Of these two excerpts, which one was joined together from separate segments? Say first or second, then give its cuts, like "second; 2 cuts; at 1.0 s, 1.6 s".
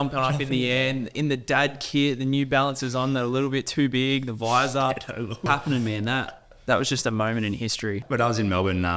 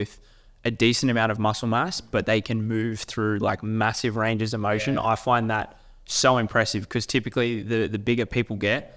first; 2 cuts; at 5.5 s, 8.0 s